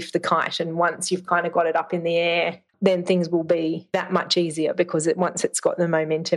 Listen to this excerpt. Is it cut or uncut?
cut